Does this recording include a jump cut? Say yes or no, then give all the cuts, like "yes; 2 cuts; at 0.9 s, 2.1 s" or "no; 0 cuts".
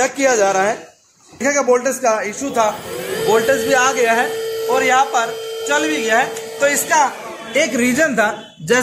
yes; 1 cut; at 1.4 s